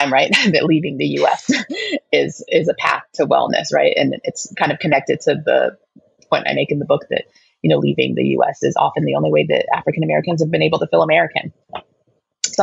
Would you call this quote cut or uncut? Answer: uncut